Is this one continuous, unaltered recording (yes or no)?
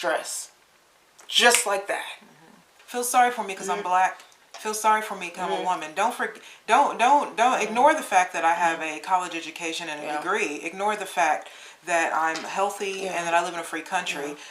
no